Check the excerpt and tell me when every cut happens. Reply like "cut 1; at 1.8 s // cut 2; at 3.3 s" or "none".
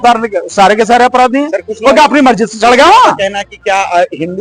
none

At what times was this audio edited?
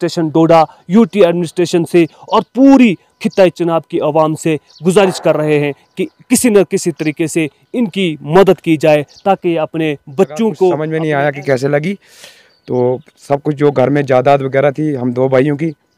cut 1; at 10.8 s

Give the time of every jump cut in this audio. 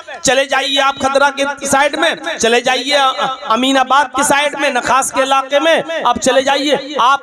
none

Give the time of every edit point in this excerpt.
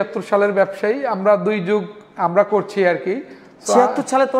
none

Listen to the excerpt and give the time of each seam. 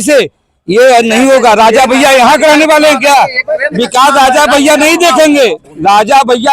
none

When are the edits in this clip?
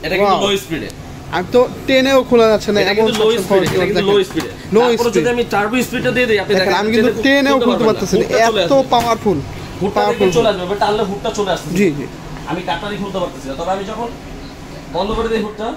none

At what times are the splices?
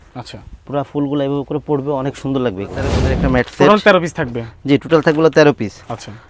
cut 1; at 3.0 s

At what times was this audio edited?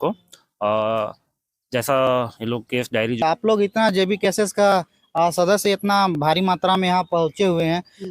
cut 1; at 3.2 s

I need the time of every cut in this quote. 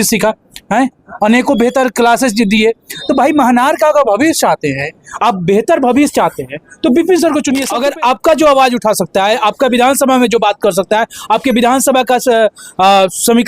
cut 1; at 7.7 s

